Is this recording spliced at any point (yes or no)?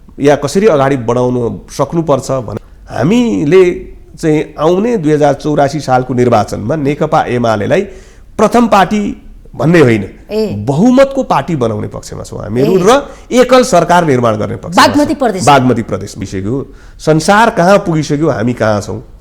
yes